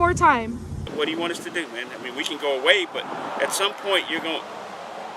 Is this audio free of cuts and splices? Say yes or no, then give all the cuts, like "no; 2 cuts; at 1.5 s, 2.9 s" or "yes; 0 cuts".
no; 1 cut; at 0.9 s